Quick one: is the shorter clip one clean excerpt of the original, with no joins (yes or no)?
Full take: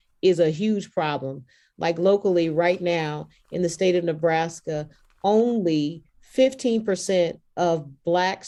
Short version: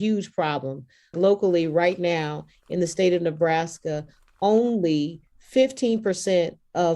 no